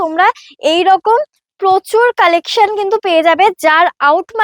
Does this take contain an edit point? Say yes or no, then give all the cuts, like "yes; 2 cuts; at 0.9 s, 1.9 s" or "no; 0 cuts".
no; 0 cuts